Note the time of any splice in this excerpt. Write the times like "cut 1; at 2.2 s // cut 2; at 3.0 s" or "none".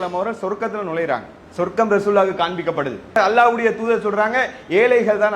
cut 1; at 1.4 s // cut 2; at 3.2 s